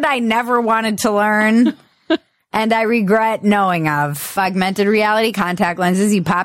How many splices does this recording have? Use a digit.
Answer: 1